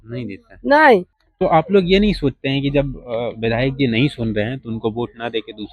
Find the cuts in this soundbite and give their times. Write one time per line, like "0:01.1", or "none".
0:01.2